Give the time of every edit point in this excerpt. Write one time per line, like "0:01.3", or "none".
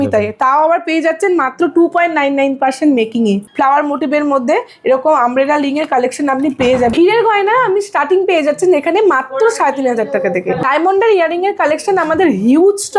0:03.4
0:06.9
0:10.6

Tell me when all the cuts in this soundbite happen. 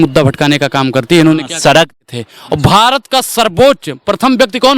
0:01.9

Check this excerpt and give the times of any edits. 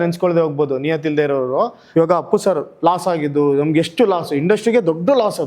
0:01.8

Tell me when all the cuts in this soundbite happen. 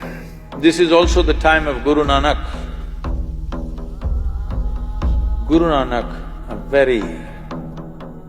none

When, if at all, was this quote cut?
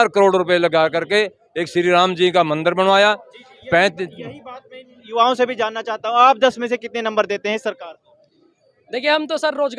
none

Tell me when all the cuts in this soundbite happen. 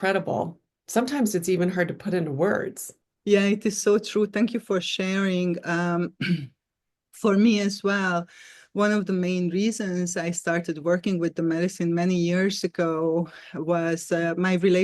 none

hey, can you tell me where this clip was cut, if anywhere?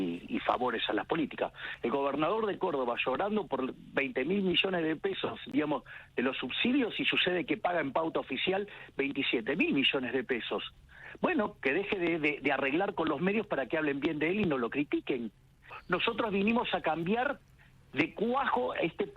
0:01.7
0:15.8

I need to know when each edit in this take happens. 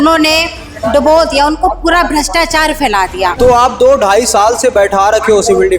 0:03.3

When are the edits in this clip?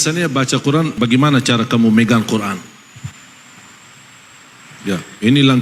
0:00.9

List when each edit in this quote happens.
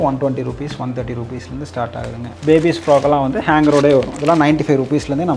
none

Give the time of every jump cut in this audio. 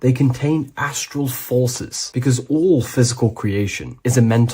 0:01.4

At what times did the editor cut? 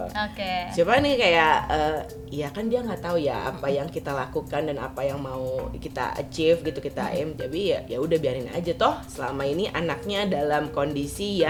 none

